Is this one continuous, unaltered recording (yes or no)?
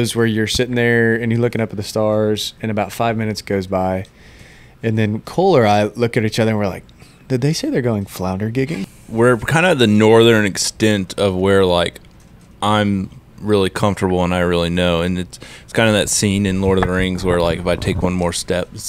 no